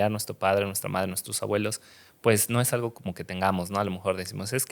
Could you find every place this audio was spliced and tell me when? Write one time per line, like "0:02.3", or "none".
none

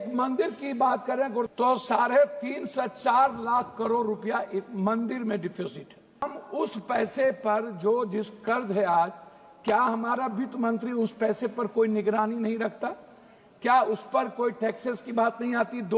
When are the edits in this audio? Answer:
0:01.5
0:06.3

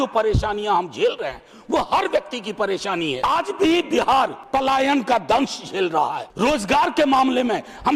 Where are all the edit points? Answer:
0:03.2
0:04.4
0:06.2

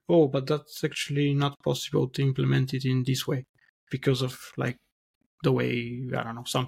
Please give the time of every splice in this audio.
none

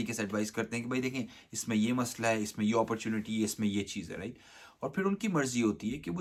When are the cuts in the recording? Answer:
none

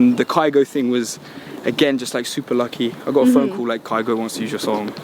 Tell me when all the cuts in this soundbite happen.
none

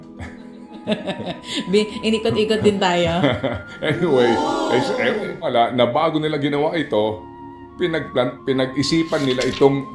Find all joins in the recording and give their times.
0:05.5

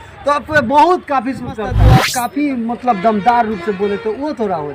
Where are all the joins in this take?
0:01.8

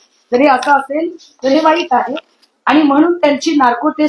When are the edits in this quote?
none

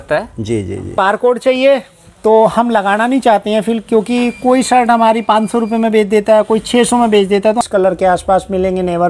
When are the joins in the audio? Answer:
0:00.9
0:07.6

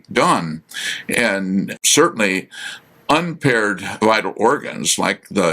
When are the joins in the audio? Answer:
0:01.8

